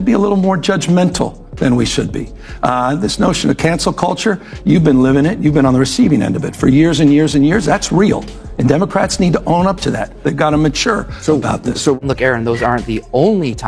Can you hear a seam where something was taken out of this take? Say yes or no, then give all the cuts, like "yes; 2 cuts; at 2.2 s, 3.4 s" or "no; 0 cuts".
yes; 2 cuts; at 2.7 s, 12.0 s